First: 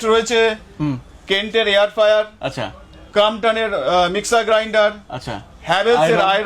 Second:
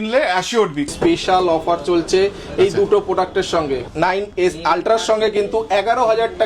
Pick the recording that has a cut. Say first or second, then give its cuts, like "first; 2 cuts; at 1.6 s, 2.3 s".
second; 2 cuts; at 0.9 s, 3.8 s